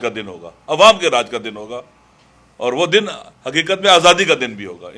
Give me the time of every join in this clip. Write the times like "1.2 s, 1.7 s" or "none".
none

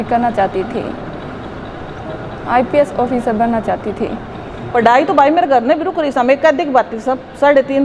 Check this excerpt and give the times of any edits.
4.7 s

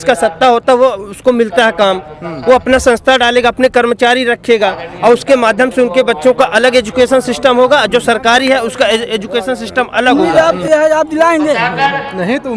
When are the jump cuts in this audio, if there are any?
10.2 s

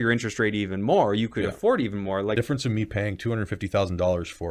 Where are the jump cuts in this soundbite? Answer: 2.4 s

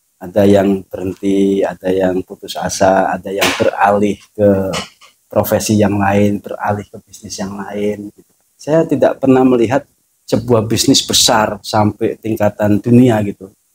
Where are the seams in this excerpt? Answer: none

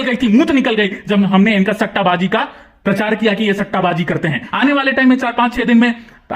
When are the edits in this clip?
4.4 s

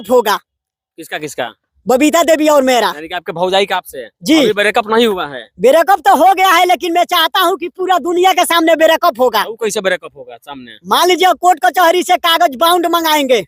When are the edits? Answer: none

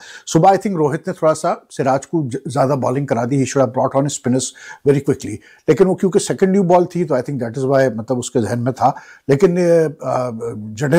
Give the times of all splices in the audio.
none

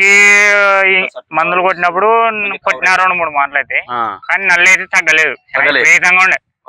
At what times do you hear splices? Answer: none

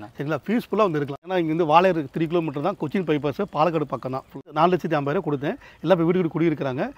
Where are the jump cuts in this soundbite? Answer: 1.3 s, 4.4 s

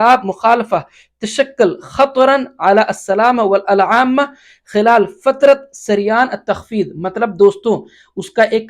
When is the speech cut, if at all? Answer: none

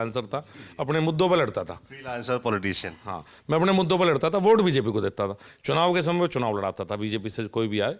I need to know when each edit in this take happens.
none

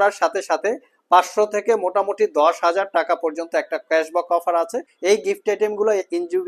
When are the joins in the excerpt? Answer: 4.9 s

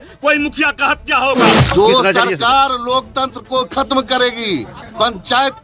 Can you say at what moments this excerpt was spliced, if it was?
1.6 s

